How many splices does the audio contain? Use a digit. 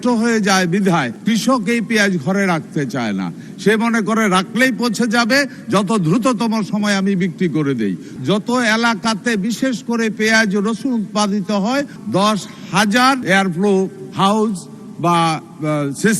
4